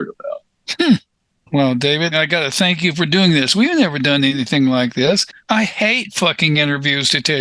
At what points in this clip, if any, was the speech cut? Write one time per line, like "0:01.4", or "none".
0:01.2
0:02.1